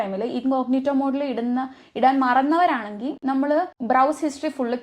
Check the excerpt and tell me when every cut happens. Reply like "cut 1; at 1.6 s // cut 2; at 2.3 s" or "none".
cut 1; at 3.8 s